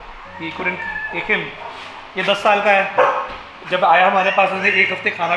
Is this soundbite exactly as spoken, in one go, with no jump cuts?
yes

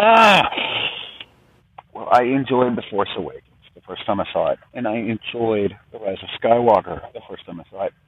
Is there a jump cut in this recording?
no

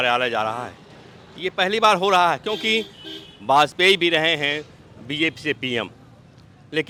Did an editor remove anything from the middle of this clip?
no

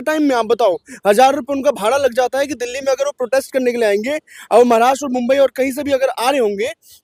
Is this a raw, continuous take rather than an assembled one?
yes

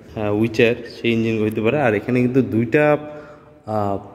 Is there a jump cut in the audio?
no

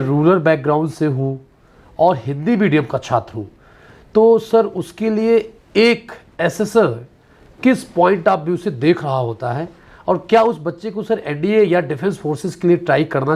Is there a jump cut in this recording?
no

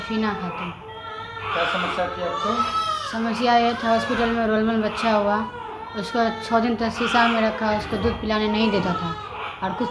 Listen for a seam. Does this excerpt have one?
no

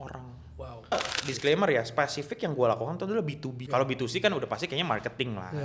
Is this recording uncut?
no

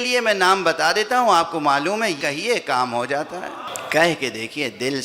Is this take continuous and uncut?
no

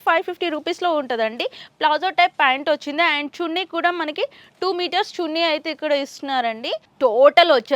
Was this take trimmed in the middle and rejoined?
yes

